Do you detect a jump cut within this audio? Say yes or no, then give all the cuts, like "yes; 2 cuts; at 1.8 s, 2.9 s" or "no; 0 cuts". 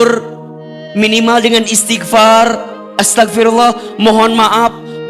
no; 0 cuts